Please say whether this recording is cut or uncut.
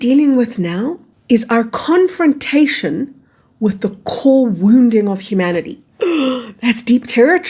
cut